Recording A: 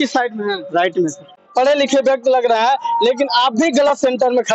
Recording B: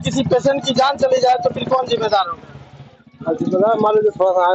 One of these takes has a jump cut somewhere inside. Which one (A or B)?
A